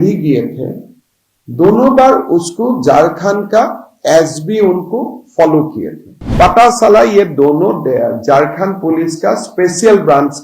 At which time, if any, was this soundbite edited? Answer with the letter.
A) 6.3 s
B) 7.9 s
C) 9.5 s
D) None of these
A